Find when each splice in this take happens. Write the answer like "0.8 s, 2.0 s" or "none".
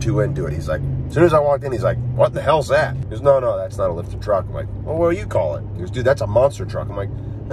3.0 s